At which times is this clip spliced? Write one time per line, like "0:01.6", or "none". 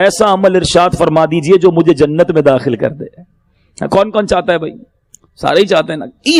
none